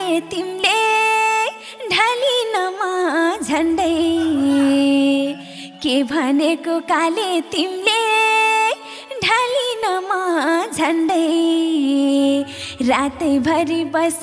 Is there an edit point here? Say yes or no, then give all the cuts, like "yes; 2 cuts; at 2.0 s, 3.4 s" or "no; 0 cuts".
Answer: no; 0 cuts